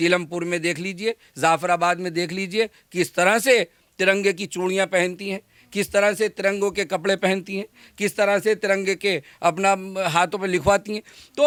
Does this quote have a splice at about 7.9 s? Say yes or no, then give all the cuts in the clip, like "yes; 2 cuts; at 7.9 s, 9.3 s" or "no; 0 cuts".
no; 0 cuts